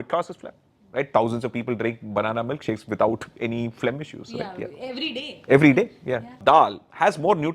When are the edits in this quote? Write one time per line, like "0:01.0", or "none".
0:06.4